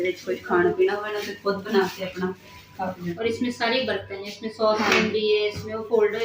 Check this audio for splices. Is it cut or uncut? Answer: cut